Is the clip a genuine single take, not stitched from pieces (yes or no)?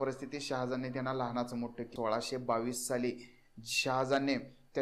no